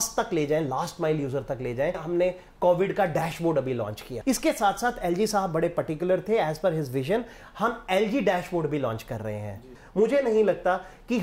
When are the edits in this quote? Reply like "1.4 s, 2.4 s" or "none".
2.0 s, 4.1 s, 9.8 s